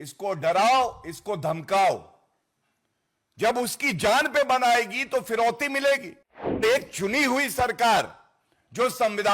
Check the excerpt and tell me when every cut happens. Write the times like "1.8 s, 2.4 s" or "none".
6.6 s